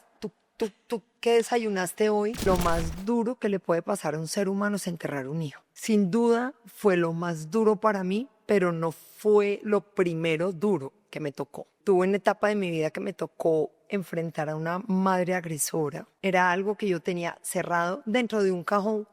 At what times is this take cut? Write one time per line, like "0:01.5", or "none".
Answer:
0:02.5
0:05.7
0:11.7
0:16.1